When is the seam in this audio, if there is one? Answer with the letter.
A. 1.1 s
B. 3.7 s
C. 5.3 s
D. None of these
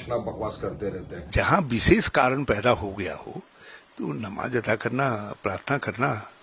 A